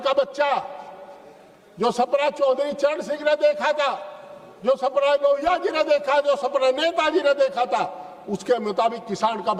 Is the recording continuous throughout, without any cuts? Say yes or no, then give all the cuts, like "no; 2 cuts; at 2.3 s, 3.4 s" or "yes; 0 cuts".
yes; 0 cuts